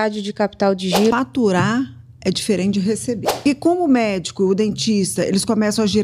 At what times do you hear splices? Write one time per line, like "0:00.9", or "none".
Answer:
0:01.1
0:03.3